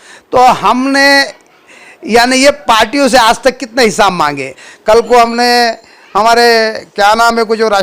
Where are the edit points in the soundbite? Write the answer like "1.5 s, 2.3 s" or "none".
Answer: 4.7 s